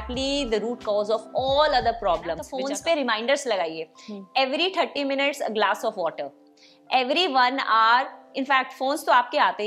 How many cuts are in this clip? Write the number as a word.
one